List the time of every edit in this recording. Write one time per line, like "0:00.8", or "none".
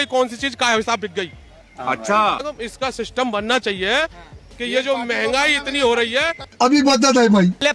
none